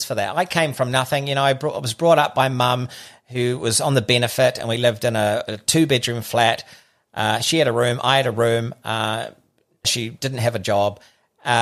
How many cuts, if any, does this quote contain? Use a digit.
0